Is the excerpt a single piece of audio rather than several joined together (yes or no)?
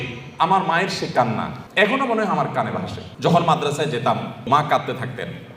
no